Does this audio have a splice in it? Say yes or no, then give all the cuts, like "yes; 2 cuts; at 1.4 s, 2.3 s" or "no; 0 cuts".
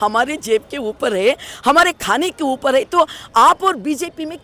no; 0 cuts